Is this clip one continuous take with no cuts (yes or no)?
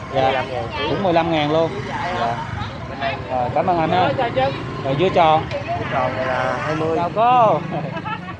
no